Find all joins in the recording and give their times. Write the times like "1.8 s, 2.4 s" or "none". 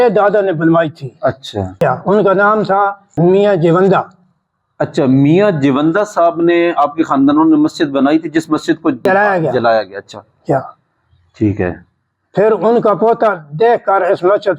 1.8 s, 3.1 s, 9.1 s